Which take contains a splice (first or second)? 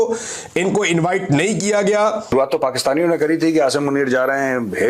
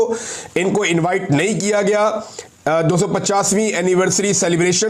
first